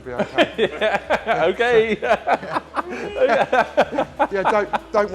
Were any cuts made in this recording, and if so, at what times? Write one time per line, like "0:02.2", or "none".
none

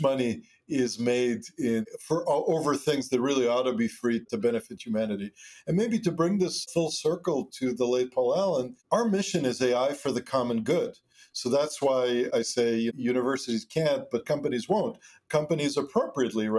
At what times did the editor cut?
none

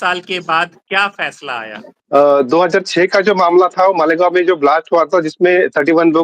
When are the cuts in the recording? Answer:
0:01.9

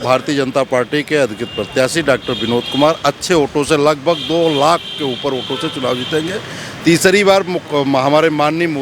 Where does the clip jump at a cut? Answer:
none

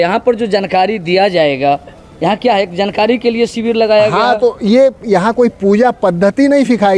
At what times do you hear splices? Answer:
none

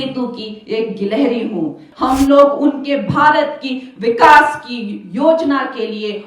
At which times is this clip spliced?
0:01.8

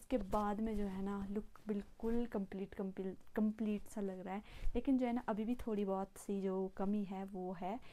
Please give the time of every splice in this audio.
none

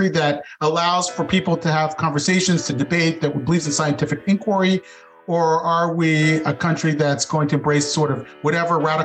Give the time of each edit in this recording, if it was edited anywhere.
none

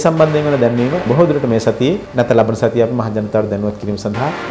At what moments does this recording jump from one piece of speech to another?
0:01.0
0:02.1

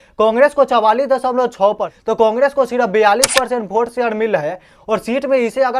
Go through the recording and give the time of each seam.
0:01.9

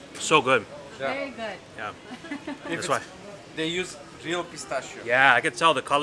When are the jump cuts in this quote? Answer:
none

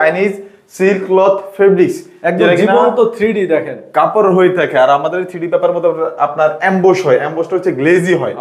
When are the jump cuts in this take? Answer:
none

